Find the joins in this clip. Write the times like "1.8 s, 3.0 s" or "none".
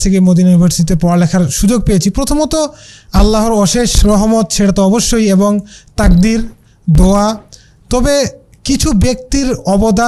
none